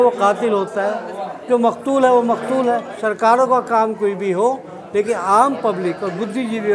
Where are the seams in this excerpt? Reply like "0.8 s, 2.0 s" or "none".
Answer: 2.9 s